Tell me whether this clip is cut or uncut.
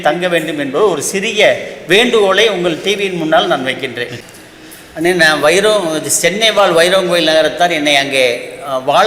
cut